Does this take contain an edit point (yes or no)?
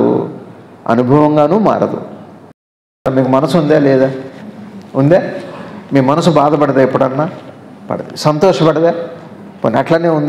yes